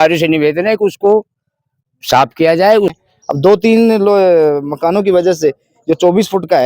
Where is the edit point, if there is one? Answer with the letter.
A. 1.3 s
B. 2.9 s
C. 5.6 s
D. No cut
B